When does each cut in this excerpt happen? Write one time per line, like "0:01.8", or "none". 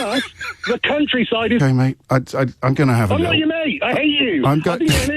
0:01.6